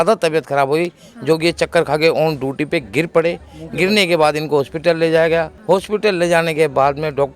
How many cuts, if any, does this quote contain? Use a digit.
0